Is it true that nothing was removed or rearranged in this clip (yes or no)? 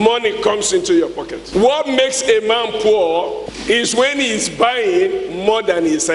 no